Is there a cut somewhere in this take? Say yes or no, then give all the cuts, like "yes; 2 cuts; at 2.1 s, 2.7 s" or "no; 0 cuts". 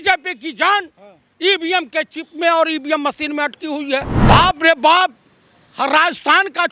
yes; 1 cut; at 4.1 s